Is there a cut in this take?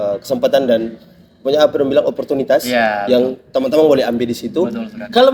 no; 0 cuts

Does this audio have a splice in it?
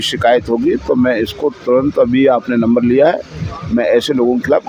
no; 0 cuts

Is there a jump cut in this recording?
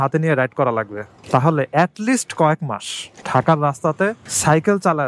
yes; 1 cut; at 1.2 s

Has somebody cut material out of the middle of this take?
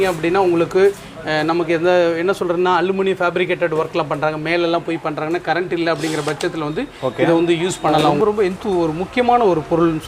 yes; 1 cut; at 8.2 s

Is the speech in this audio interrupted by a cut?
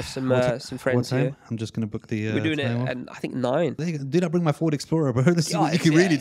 yes; 1 cut; at 3.8 s

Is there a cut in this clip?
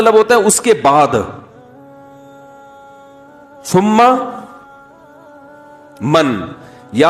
yes; 2 cuts; at 1.9 s, 3.5 s

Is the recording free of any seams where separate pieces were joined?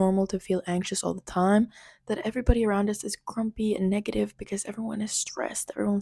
yes; 0 cuts

